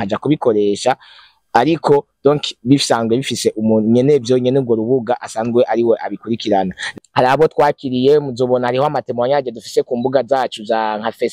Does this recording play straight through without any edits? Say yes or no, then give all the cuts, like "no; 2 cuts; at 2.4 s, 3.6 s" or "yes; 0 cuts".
no; 1 cut; at 6.8 s